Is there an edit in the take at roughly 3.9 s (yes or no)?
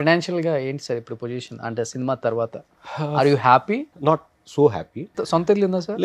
yes